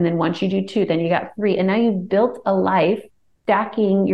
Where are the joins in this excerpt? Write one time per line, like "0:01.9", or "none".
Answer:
none